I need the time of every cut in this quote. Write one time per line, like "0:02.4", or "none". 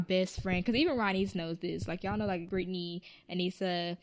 0:02.5